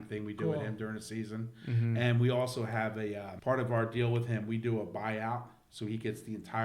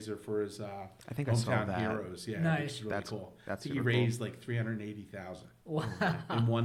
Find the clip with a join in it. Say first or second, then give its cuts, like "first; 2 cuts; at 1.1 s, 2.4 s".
first; 1 cut; at 3.3 s